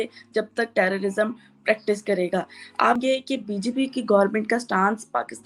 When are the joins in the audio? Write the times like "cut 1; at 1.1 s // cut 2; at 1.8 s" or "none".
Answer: none